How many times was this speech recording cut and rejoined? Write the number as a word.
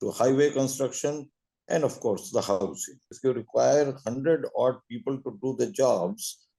one